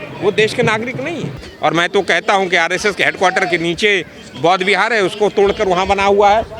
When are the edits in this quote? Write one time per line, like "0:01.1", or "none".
0:01.4